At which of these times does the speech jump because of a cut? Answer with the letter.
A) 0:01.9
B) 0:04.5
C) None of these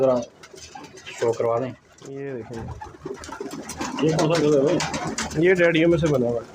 A